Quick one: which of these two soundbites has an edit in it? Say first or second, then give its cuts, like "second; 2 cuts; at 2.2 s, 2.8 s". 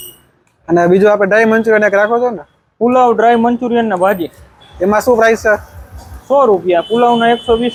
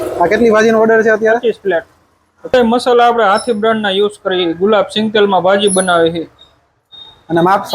second; 1 cut; at 2.5 s